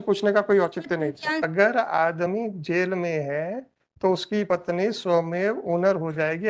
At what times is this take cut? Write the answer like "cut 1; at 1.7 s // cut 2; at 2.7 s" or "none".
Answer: cut 1; at 1.4 s